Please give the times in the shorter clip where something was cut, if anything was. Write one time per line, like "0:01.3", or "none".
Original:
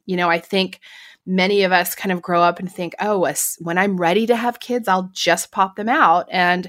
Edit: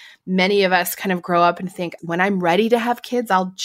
0:01.9